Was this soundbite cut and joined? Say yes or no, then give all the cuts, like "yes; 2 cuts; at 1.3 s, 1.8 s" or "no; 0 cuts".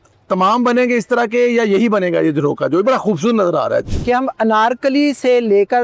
yes; 1 cut; at 3.9 s